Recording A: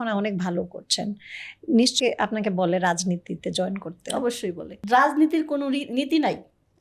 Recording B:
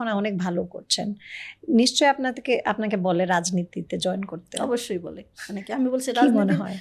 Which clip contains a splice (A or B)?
A